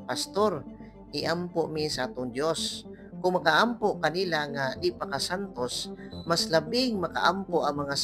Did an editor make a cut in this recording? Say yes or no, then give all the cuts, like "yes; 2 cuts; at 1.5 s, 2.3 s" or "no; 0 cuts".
no; 0 cuts